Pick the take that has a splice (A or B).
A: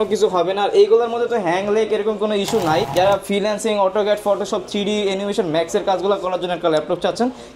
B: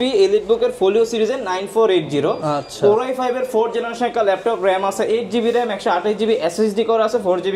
A